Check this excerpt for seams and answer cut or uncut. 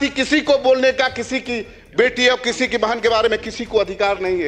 uncut